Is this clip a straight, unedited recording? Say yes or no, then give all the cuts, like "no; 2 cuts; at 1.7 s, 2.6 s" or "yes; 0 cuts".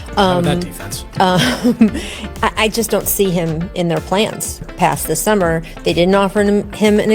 no; 1 cut; at 4.7 s